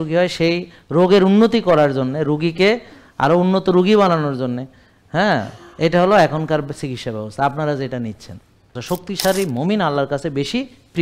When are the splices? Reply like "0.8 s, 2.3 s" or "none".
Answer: 8.8 s